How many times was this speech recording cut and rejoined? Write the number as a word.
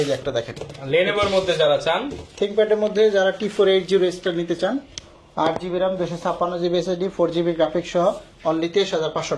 zero